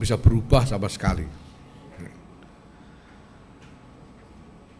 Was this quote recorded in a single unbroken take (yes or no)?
yes